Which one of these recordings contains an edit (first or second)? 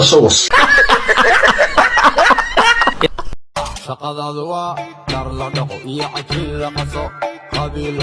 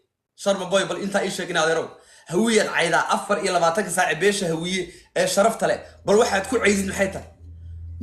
first